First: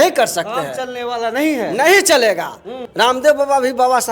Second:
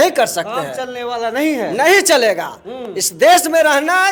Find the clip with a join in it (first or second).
first